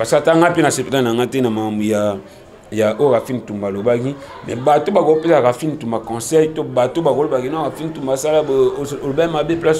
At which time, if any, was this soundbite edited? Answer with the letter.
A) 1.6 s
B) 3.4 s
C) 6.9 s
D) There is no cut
D